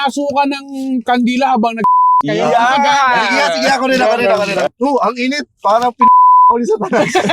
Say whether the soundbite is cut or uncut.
cut